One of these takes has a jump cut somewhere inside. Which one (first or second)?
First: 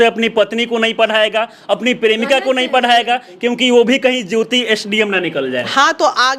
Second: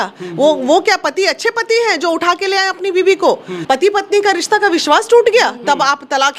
second